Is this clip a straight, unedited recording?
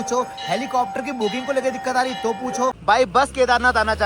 no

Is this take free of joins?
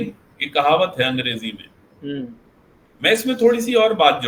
yes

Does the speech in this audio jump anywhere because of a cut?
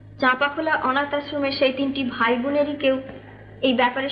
no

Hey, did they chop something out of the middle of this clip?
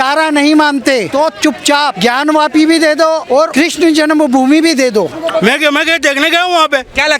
yes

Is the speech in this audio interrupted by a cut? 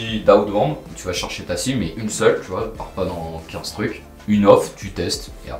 no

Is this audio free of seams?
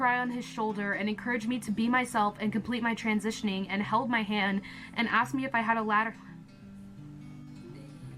yes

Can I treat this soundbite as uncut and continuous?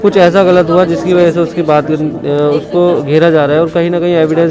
yes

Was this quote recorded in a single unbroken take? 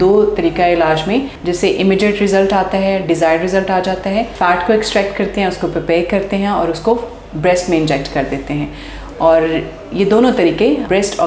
no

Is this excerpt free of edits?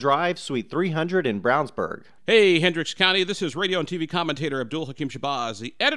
no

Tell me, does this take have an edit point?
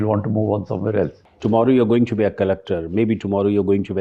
yes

